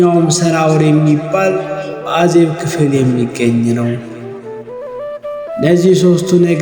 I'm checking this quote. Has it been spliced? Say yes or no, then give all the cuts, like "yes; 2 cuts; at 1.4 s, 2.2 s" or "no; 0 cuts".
yes; 2 cuts; at 4.2 s, 5.6 s